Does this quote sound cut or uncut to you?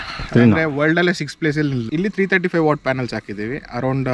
cut